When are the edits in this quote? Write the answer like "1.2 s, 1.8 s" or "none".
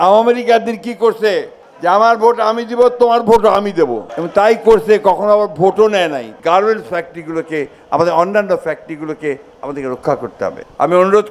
none

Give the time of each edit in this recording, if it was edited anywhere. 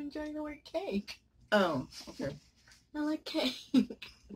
none

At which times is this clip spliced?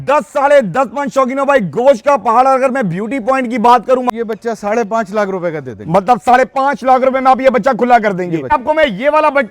4.1 s, 8.5 s

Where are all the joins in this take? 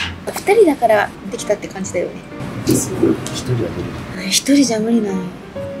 none

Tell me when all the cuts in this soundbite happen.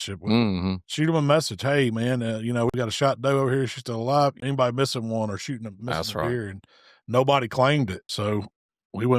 2.7 s, 4.4 s, 8.0 s

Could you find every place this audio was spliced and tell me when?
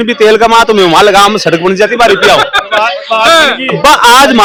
none

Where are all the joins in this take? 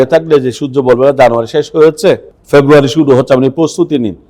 2.3 s

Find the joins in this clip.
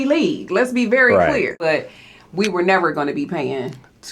1.6 s

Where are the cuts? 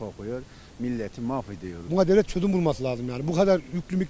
1.8 s

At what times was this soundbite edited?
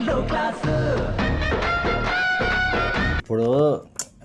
3.2 s

